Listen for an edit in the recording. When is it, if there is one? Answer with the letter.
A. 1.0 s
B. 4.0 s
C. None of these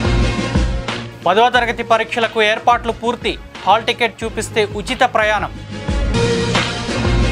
A